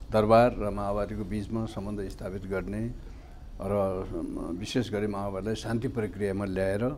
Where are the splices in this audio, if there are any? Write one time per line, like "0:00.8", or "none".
none